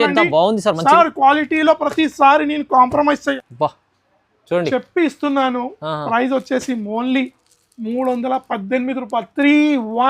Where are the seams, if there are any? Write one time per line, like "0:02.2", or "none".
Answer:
0:03.4